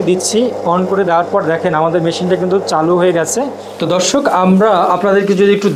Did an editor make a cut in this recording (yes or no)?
yes